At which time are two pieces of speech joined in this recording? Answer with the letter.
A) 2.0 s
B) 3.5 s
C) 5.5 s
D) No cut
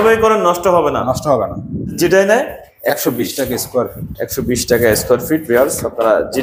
A